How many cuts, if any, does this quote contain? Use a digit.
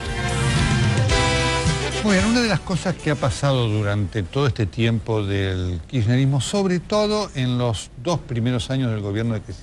0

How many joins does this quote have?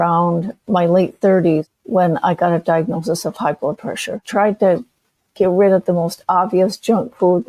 2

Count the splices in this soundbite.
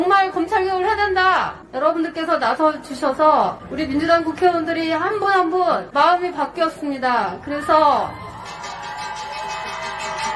3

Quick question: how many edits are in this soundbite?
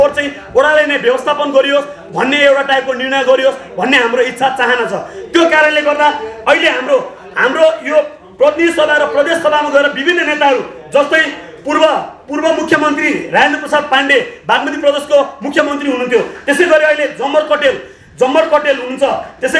0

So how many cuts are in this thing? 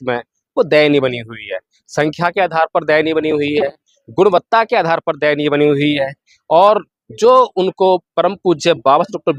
0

